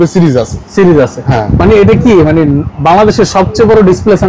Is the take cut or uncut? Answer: uncut